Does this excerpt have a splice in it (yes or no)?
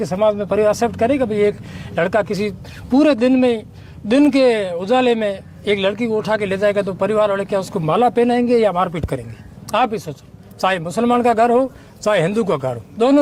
no